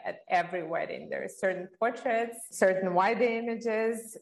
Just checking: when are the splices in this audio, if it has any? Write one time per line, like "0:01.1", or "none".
0:02.4